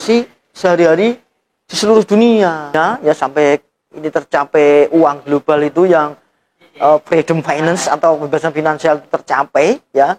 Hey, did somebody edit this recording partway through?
yes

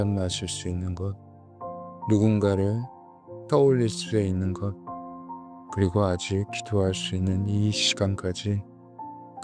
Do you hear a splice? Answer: no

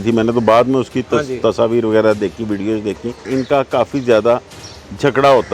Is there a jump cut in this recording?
yes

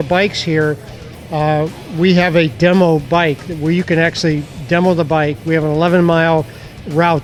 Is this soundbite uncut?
yes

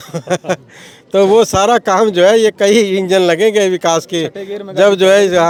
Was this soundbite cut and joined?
no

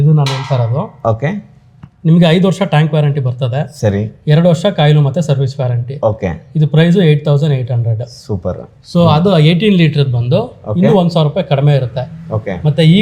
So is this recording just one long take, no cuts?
yes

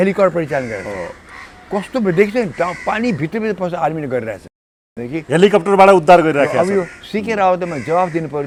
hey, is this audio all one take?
yes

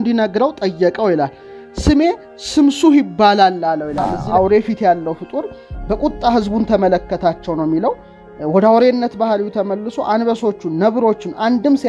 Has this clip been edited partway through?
yes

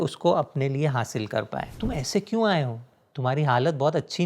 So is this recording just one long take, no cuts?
no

